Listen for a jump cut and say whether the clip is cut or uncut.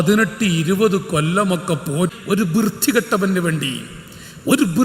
cut